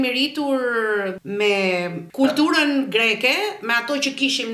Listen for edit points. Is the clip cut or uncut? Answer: cut